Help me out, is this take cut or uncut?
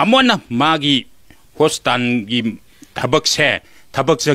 uncut